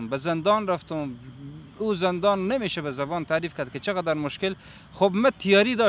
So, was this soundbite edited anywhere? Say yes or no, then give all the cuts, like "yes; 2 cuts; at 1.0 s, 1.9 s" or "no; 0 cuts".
no; 0 cuts